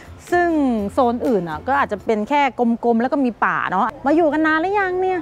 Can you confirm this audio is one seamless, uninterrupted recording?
no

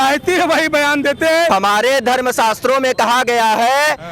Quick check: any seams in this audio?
yes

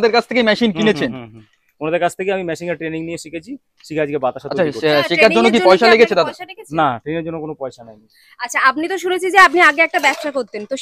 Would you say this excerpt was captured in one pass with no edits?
yes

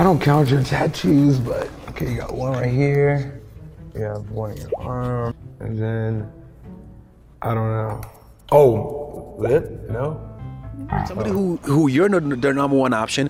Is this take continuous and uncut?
yes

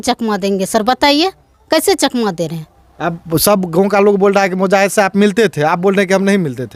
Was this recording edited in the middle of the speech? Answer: no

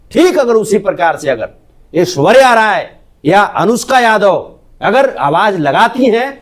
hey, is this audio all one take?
yes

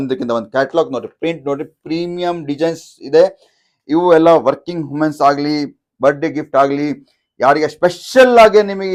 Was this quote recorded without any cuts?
yes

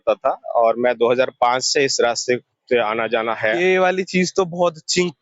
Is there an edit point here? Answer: yes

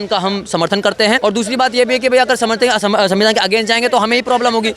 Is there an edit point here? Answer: yes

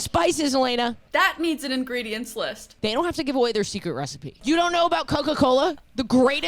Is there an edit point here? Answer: yes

